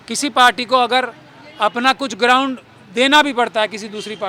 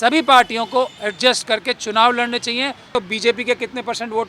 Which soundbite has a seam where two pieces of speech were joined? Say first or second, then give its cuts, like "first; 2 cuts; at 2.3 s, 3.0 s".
second; 1 cut; at 2.9 s